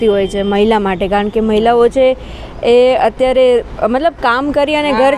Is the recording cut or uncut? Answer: uncut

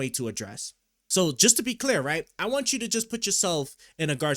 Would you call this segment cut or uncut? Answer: cut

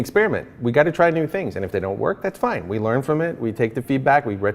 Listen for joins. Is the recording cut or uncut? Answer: uncut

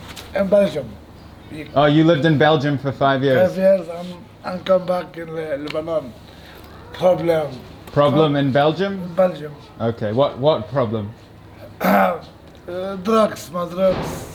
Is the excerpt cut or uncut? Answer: uncut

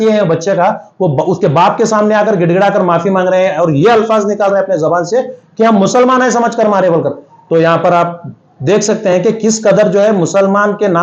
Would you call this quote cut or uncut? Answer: uncut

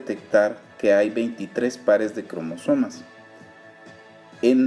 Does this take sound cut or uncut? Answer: cut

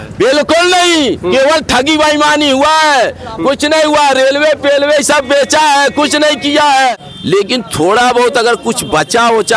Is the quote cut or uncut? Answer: cut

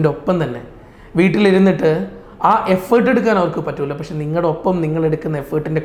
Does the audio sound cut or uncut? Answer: uncut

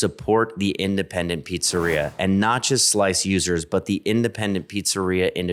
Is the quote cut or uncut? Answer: uncut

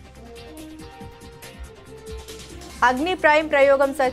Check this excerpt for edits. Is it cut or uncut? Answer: cut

